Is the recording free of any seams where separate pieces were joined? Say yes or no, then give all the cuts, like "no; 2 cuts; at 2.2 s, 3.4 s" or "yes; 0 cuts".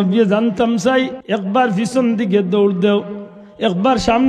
no; 1 cut; at 1.2 s